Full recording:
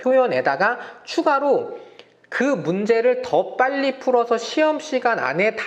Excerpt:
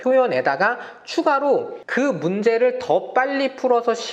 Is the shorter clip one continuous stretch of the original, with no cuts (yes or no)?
no